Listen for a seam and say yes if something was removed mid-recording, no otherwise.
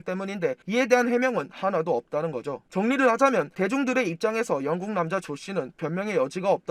no